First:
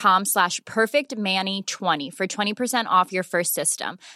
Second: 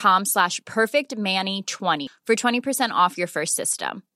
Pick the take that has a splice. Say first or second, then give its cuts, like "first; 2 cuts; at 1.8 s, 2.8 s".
second; 1 cut; at 2.1 s